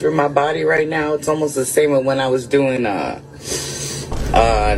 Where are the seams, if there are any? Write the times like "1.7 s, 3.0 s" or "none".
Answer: none